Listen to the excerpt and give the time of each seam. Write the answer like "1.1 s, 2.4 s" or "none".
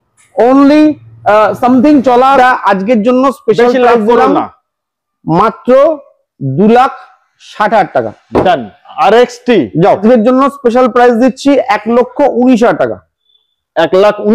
2.4 s, 10.0 s